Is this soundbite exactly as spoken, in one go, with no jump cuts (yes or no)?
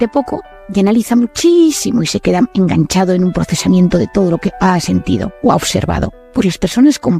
no